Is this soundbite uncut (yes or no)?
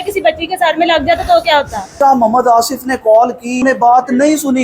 no